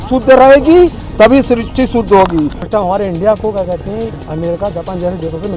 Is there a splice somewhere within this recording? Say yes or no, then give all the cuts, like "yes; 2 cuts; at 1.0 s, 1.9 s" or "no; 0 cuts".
yes; 1 cut; at 2.6 s